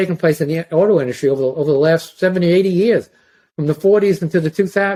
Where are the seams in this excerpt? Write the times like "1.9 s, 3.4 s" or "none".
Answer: none

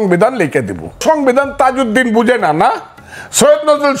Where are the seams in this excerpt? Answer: 1.0 s

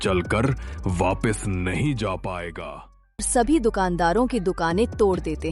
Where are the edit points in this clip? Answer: 3.3 s

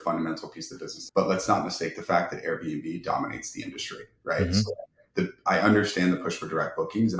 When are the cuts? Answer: 0.9 s

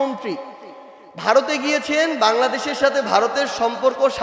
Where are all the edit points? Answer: none

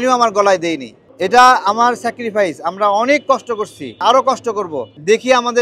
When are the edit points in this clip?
1.0 s, 4.0 s

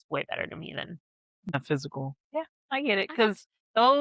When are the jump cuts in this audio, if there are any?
1.5 s

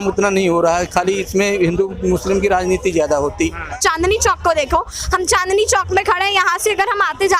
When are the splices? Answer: 3.7 s

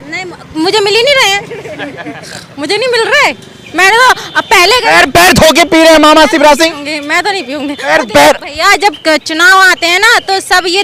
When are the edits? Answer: none

